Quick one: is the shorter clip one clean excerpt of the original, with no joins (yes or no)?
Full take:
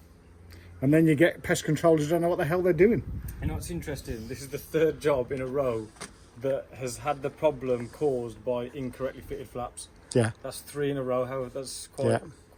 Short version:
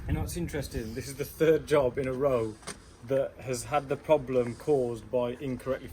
yes